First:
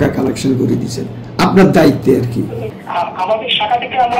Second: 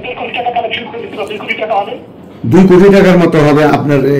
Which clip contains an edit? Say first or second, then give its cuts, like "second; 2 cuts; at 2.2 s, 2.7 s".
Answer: first; 1 cut; at 2.6 s